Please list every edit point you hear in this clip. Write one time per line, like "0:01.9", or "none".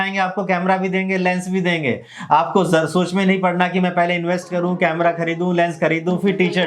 none